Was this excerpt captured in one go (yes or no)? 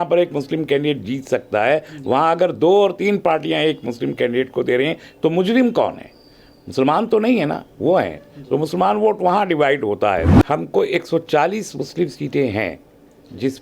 no